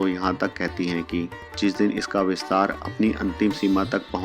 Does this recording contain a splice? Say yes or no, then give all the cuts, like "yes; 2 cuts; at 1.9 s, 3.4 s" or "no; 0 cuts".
no; 0 cuts